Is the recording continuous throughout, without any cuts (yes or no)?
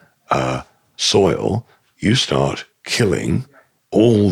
yes